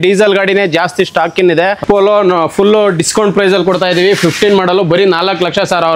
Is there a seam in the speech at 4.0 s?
no; 1 cut; at 1.8 s

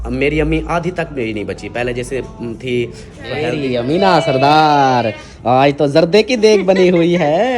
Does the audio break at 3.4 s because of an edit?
yes; 1 cut; at 3.4 s

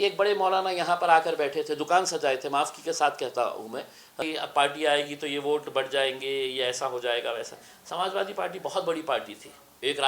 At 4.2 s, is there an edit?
yes; 1 cut; at 4.2 s

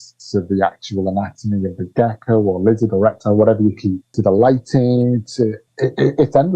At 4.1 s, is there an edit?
yes; 2 cuts; at 4.1 s, 5.6 s

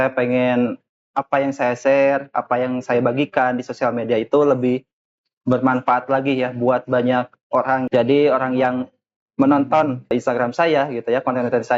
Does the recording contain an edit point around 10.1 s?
yes; 2 cuts; at 7.8 s, 10.1 s

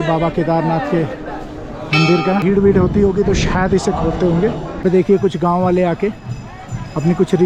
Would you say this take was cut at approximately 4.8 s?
yes; 2 cuts; at 2.4 s, 4.8 s

